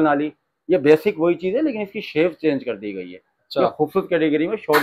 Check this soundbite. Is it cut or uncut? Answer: uncut